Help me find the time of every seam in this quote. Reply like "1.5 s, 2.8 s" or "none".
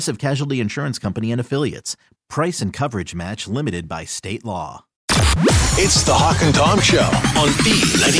5.0 s